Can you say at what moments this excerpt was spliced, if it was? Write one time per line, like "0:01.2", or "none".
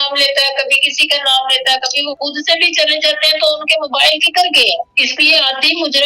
0:02.2
0:04.9